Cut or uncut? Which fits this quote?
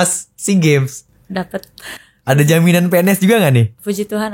uncut